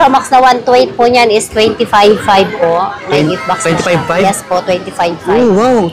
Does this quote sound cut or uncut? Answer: uncut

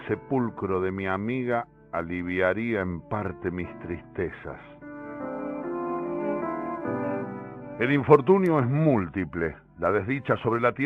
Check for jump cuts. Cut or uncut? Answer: cut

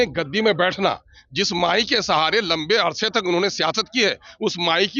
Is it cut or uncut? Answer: uncut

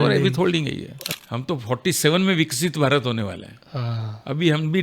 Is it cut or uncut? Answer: cut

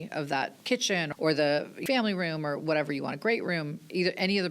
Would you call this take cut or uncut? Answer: cut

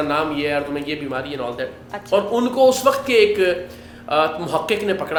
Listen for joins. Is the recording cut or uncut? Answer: uncut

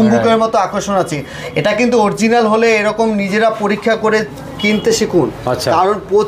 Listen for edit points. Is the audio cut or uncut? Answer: uncut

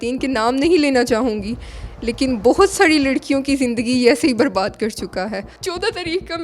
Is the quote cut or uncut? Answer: cut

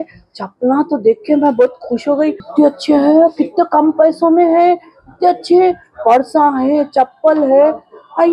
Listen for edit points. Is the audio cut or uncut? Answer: cut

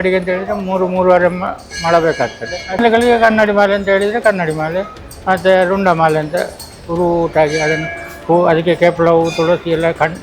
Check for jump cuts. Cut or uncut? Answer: cut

